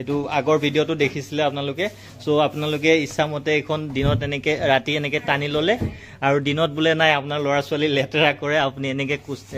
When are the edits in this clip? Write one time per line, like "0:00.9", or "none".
none